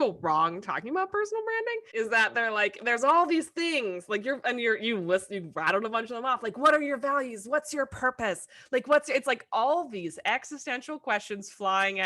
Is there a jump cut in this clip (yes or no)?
yes